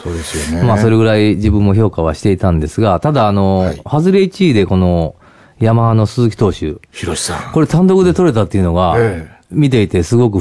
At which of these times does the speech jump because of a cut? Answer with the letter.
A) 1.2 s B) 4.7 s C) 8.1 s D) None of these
C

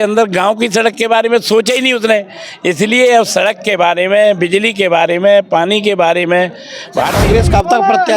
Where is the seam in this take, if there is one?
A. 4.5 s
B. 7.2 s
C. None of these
B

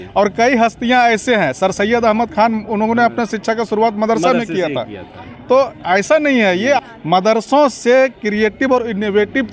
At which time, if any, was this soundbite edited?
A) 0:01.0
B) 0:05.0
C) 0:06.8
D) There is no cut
C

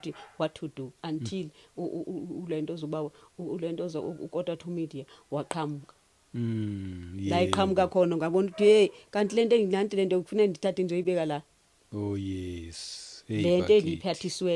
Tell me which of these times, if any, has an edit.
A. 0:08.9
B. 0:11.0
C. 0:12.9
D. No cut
D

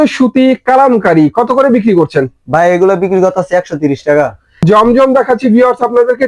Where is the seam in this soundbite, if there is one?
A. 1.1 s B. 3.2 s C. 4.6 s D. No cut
C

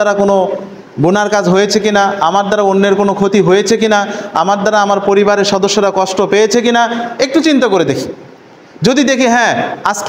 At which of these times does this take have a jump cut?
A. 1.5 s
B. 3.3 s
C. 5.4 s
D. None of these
D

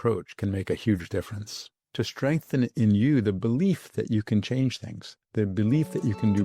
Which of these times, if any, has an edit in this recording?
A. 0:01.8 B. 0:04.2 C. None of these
A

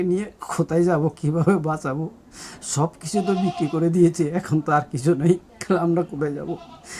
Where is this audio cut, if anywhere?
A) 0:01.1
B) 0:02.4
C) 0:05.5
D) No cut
C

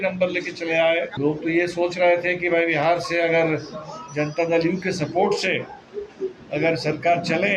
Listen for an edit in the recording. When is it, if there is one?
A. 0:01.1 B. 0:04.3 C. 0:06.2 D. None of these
A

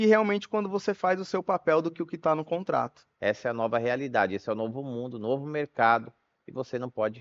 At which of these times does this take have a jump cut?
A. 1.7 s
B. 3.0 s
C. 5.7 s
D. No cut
B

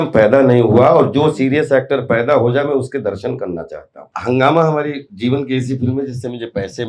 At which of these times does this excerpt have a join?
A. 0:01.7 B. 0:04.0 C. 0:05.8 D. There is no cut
B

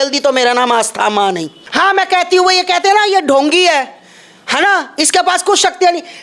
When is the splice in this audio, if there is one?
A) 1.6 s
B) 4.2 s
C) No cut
A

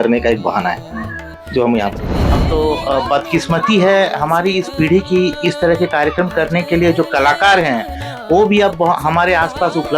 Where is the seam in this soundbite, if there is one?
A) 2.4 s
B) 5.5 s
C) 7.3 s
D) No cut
A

